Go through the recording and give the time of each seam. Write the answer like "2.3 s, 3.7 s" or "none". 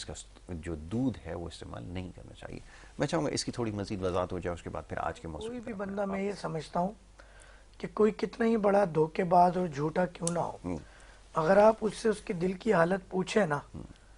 5.6 s